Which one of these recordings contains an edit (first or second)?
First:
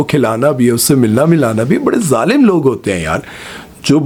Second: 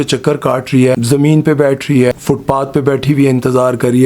second